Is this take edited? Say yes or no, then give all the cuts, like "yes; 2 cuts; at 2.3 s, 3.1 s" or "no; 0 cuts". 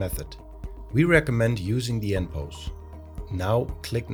no; 0 cuts